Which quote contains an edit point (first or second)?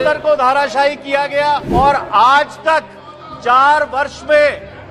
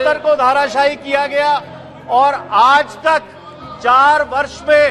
first